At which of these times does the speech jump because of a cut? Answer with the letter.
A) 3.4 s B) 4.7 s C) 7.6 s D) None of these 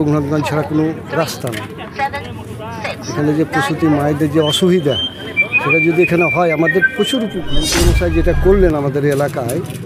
C